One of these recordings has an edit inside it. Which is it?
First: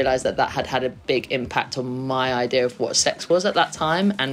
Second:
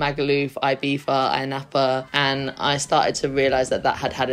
second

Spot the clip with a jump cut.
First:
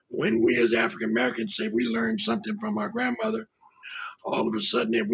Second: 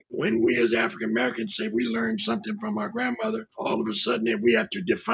second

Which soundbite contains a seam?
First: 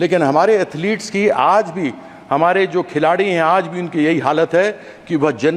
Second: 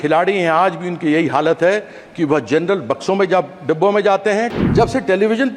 second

